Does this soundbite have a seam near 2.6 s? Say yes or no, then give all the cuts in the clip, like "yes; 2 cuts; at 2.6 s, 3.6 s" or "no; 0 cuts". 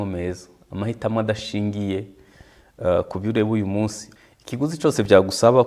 no; 1 cut; at 4.1 s